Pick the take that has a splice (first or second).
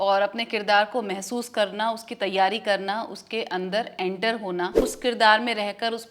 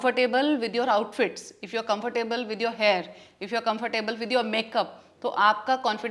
first